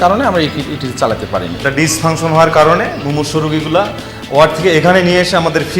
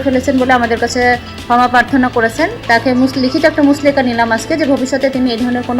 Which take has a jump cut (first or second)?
first